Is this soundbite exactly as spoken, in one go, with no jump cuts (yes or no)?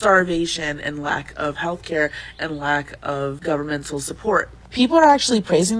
yes